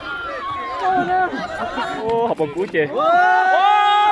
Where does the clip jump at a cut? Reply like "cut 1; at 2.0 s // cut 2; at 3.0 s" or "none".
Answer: cut 1; at 2.0 s